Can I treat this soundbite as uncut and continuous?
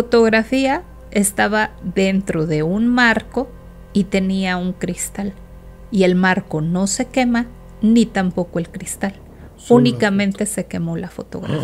yes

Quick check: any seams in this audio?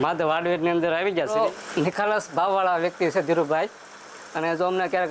yes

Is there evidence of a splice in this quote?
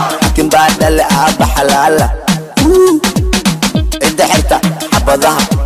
no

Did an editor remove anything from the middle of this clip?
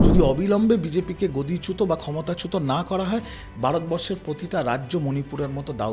no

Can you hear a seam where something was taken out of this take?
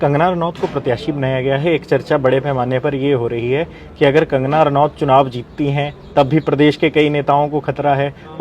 no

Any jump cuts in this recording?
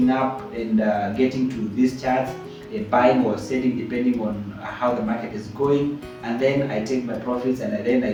no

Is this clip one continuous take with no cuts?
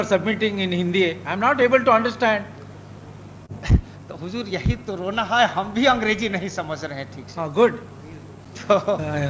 yes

